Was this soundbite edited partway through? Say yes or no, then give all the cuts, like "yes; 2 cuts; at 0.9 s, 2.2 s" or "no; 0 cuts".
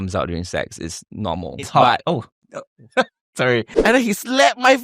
yes; 1 cut; at 3.7 s